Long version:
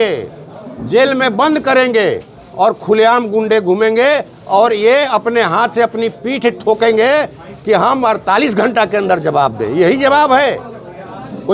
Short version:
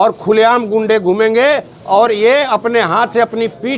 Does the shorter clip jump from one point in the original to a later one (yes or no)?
no